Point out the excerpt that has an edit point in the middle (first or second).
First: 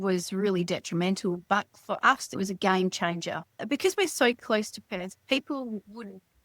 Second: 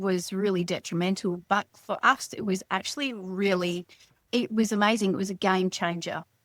first